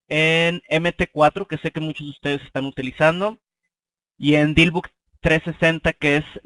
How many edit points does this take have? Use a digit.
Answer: 1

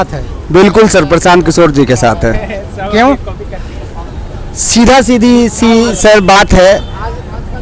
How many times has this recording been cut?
0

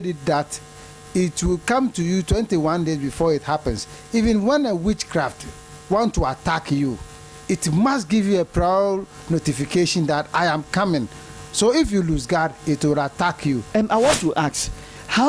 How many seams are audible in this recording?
1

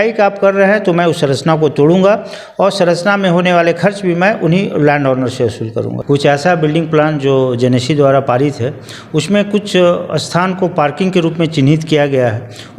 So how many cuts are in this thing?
1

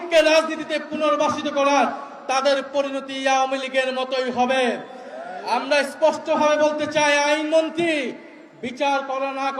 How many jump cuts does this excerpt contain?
0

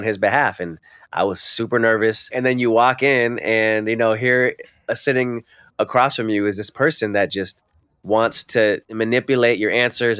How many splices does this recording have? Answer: 2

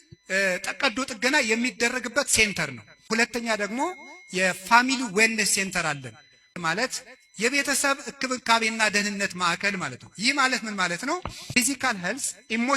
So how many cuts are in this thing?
3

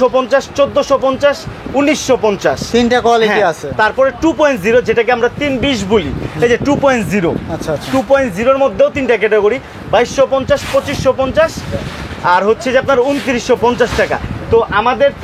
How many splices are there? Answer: 0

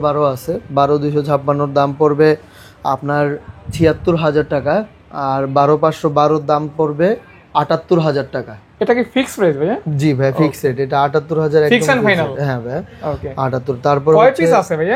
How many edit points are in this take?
0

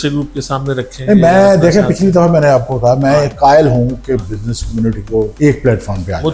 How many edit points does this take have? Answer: 1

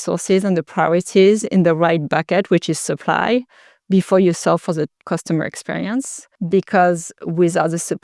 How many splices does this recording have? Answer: 2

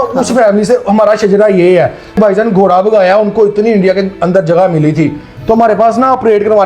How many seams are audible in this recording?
2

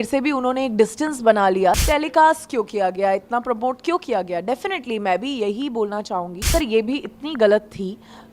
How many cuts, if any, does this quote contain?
2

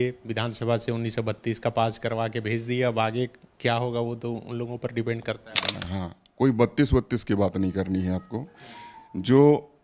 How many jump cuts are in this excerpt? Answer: 1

